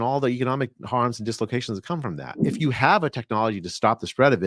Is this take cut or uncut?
cut